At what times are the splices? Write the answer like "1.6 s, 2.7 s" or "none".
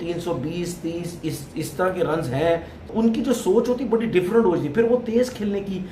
2.8 s